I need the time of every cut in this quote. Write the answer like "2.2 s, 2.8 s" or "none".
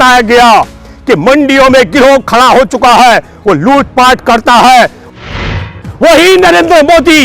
5.3 s